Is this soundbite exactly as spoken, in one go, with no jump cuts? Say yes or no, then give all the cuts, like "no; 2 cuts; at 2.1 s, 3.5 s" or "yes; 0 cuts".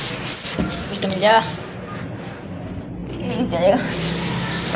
no; 1 cut; at 0.9 s